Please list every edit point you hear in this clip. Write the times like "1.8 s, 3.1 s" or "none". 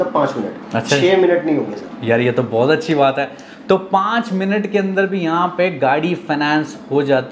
none